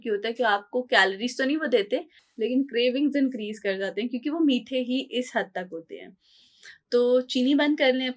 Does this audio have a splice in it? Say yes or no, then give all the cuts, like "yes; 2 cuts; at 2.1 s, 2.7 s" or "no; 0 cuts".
no; 0 cuts